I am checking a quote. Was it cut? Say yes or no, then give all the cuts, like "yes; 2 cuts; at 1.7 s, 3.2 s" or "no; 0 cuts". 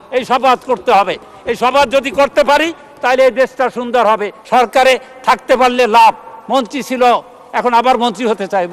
yes; 1 cut; at 4.3 s